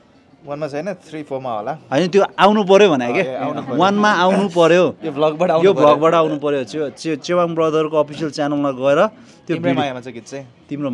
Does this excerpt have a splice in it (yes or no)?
no